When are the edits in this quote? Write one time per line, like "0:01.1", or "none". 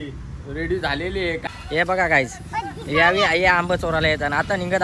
0:01.5